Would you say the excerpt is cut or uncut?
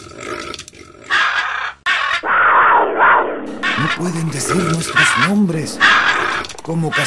cut